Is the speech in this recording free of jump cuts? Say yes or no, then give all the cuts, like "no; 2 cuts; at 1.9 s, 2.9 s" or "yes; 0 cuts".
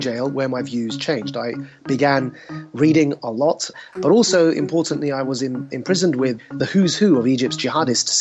no; 2 cuts; at 3.8 s, 6.4 s